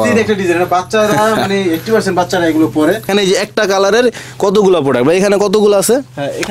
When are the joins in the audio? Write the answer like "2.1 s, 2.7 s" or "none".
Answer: 3.1 s